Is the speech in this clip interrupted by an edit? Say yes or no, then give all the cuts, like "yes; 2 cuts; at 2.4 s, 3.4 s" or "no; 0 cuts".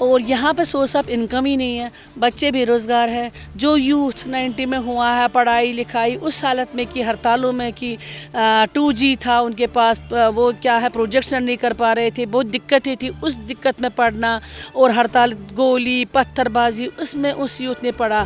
no; 0 cuts